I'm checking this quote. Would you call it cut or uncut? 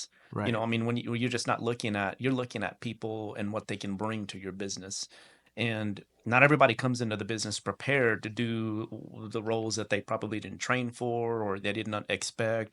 uncut